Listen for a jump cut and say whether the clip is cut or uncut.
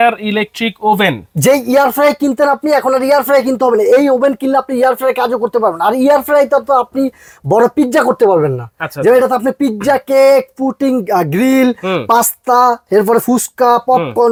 uncut